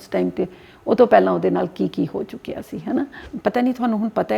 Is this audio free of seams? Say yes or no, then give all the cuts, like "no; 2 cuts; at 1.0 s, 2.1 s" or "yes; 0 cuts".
no; 1 cut; at 3.2 s